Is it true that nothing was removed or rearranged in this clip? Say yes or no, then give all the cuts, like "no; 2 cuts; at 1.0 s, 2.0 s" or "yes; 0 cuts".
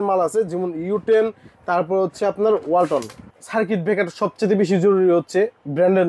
no; 1 cut; at 3.3 s